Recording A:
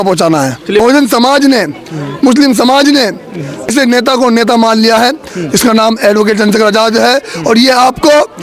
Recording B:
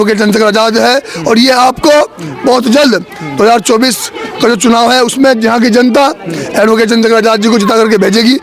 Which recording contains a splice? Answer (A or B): A